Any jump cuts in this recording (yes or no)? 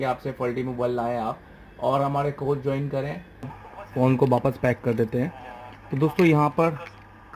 yes